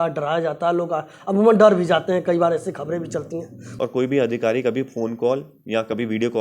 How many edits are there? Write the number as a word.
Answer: one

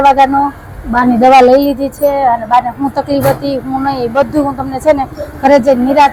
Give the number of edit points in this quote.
zero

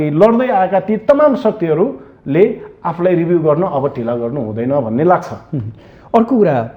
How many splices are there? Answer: zero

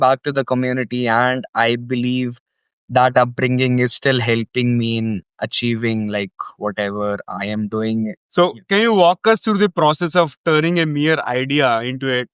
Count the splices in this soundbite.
one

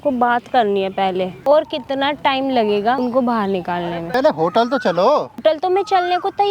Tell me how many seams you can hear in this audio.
four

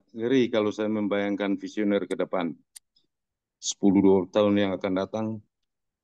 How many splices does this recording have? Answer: zero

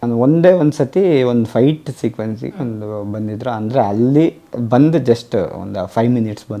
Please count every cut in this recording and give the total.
zero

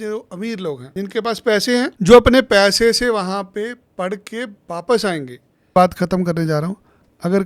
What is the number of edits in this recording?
three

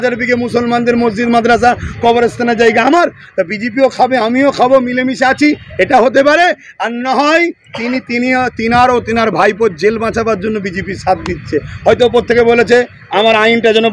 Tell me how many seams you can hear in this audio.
zero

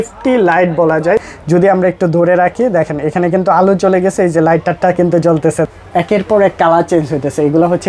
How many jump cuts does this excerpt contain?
two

